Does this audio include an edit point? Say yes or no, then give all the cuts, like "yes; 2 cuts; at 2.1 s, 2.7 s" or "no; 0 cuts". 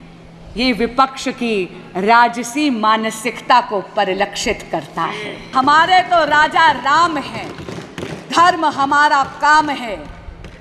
yes; 1 cut; at 5.3 s